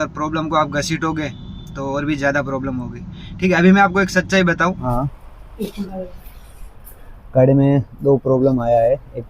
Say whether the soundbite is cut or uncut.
cut